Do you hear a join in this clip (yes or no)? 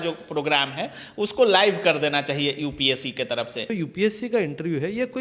yes